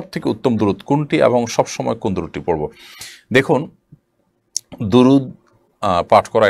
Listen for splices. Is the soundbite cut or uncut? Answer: uncut